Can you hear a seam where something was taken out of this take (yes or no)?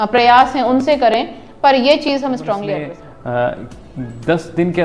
yes